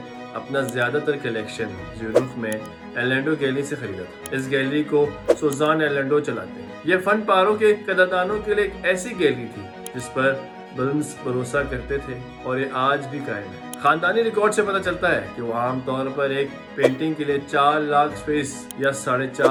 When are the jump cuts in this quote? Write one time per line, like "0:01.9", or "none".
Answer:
none